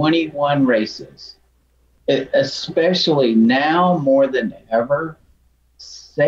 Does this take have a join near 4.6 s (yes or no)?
no